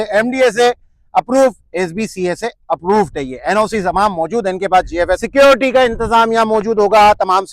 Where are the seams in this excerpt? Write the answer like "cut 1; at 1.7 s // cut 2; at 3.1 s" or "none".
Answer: cut 1; at 5.2 s